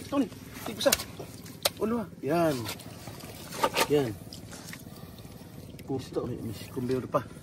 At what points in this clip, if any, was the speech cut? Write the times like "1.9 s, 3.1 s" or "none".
none